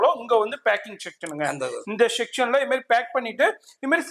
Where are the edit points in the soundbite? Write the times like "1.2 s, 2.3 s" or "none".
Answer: none